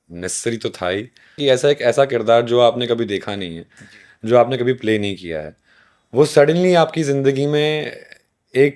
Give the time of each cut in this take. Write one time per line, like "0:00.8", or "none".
0:01.3